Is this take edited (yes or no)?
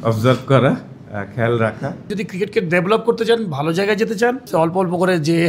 yes